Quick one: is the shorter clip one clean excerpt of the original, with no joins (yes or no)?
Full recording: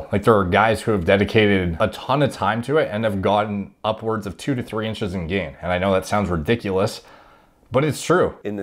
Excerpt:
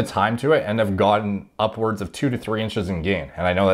yes